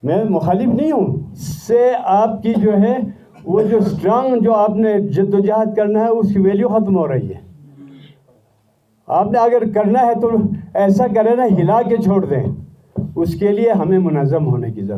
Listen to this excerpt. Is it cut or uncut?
cut